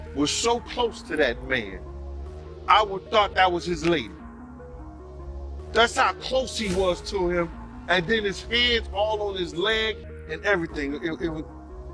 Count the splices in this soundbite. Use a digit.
2